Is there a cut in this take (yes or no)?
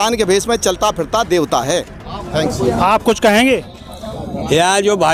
no